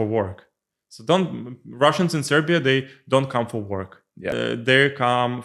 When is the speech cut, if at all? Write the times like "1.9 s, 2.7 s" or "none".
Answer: 4.3 s